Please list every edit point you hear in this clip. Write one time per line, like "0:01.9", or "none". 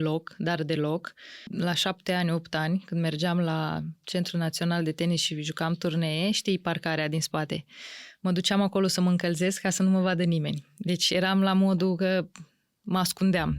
0:01.4

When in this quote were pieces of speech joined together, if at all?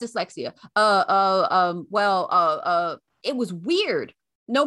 0:03.1

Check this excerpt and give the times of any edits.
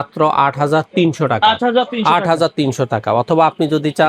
none

